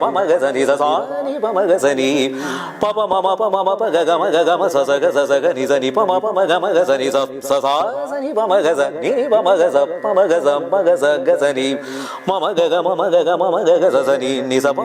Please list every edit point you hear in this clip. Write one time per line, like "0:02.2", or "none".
none